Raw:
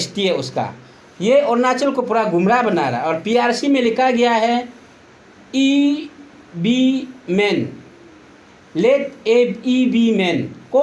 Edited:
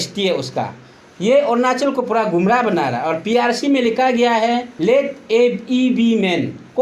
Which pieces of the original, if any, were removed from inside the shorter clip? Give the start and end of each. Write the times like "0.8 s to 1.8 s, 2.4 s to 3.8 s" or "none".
4.7 s to 8.7 s